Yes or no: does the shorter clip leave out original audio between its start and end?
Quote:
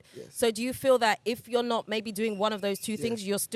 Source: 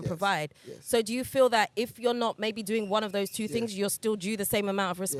no